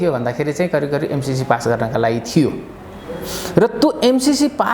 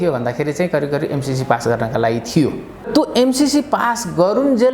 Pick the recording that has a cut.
second; 1 cut; at 2.9 s

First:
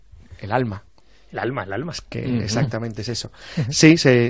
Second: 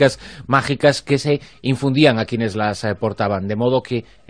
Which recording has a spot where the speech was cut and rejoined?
second; 1 cut; at 2.2 s

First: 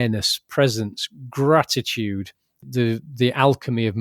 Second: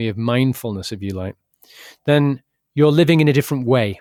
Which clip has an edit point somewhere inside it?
first; 1 cut; at 2.7 s

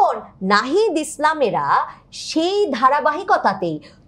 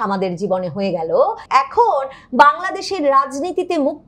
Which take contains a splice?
second; 1 cut; at 1.4 s

